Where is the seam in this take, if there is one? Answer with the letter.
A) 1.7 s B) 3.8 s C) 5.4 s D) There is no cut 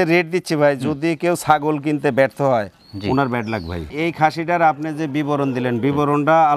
B